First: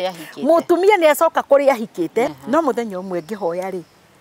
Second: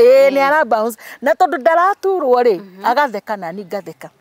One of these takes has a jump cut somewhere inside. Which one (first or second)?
first